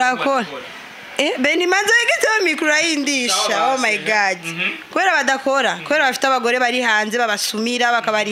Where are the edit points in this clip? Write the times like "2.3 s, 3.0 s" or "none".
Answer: none